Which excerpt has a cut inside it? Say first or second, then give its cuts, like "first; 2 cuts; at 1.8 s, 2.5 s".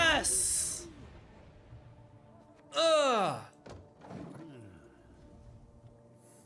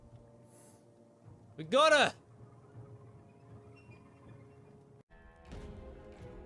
second; 1 cut; at 5.0 s